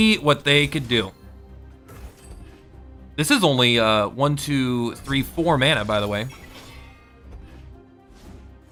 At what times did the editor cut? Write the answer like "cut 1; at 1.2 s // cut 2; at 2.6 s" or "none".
none